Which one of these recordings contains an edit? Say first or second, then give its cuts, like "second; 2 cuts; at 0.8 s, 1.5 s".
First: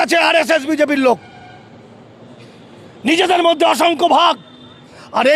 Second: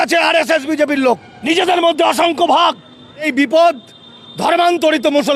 second; 2 cuts; at 1.3 s, 3.3 s